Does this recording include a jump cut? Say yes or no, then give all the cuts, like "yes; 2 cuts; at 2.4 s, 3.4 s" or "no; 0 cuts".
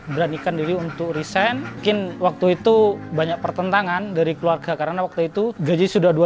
no; 0 cuts